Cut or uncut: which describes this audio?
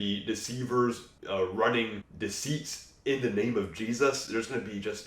cut